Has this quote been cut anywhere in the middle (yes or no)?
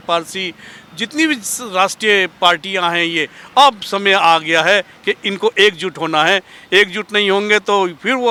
no